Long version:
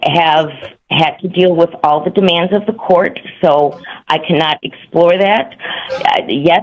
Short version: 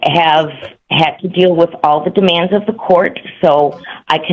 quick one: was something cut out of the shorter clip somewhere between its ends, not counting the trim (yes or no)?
no